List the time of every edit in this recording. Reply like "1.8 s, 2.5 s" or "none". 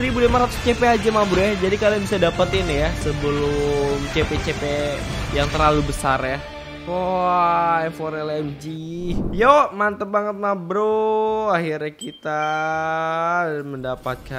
9.2 s